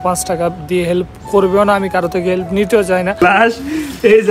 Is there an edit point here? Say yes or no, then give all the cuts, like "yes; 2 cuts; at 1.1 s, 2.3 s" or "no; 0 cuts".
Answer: yes; 1 cut; at 3.2 s